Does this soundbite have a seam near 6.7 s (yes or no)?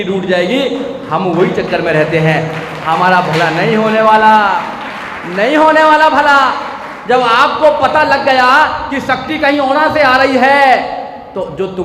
no